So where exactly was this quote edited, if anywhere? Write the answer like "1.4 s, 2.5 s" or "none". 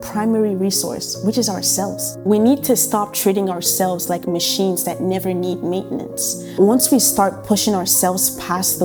none